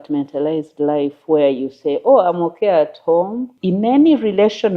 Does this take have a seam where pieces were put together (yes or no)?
yes